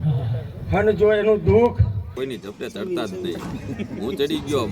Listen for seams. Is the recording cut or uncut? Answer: cut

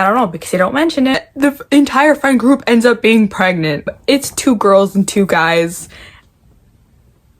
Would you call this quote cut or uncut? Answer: cut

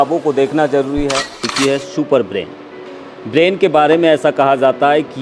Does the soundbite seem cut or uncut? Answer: cut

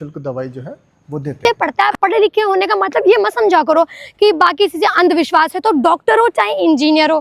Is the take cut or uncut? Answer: cut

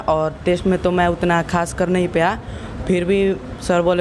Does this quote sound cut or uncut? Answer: uncut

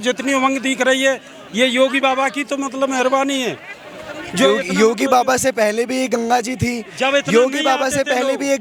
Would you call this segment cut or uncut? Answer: uncut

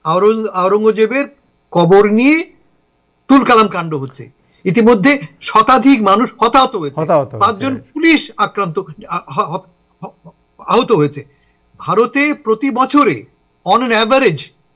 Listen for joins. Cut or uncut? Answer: uncut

